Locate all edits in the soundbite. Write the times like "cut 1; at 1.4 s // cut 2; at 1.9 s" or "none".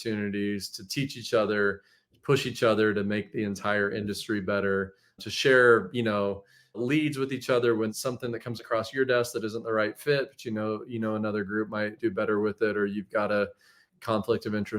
cut 1; at 5.2 s // cut 2; at 6.8 s // cut 3; at 7.9 s // cut 4; at 12.0 s